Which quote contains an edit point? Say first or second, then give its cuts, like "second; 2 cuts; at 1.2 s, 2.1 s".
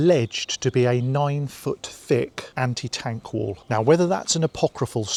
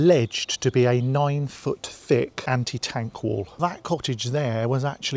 second; 2 cuts; at 2.4 s, 3.5 s